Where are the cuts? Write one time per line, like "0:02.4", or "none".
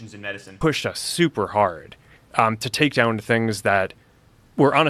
none